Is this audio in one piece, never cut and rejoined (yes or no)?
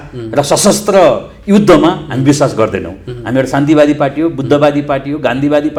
yes